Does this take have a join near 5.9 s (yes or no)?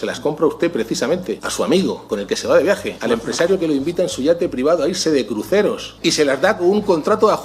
yes